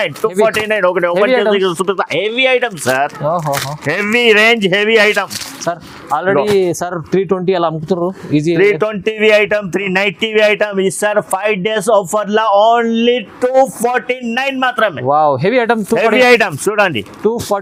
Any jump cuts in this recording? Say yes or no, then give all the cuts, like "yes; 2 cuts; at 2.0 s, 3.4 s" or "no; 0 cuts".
no; 0 cuts